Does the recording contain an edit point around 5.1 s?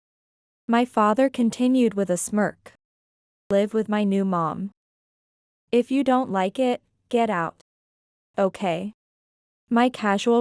no; 1 cut; at 3.5 s

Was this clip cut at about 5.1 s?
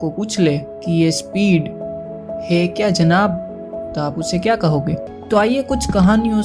yes; 1 cut; at 5.1 s

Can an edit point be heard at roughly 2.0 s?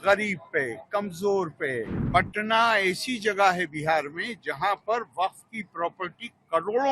yes; 1 cut; at 2.0 s

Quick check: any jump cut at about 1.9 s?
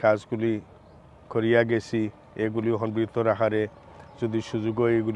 no; 0 cuts

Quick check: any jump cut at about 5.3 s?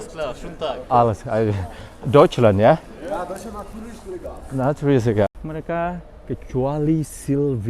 yes; 1 cut; at 5.3 s

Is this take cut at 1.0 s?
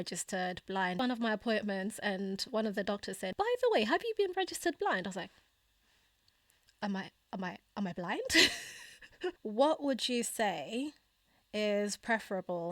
yes; 3 cuts; at 1.0 s, 3.3 s, 9.4 s

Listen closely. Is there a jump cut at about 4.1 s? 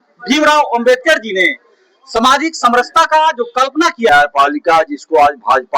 yes; 1 cut; at 4.1 s

